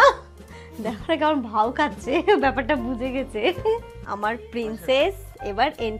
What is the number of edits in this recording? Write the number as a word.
one